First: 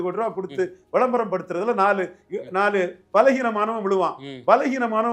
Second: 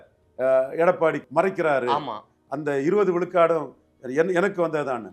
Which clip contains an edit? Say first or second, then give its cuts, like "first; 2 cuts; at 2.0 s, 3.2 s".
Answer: second; 1 cut; at 1.2 s